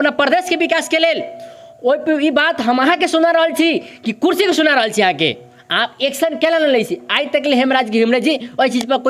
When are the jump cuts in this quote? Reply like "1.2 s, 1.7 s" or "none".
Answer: none

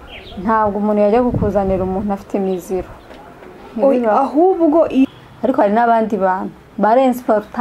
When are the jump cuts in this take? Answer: 5.1 s

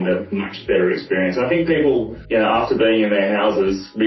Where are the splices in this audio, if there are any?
2.2 s

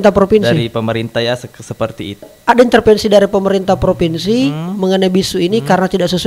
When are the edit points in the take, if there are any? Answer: 2.3 s

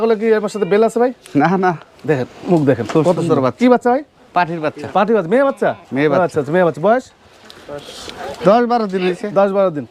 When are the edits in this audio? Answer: none

